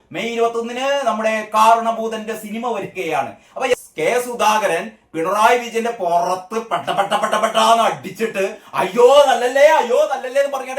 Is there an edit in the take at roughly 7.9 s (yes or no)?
no